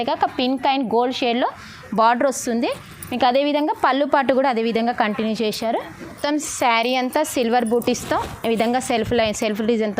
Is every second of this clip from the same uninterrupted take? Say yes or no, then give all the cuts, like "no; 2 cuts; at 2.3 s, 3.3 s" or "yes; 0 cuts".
no; 1 cut; at 6.2 s